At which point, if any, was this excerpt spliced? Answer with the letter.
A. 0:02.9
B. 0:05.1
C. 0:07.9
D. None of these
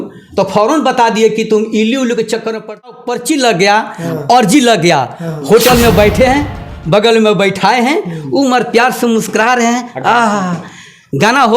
A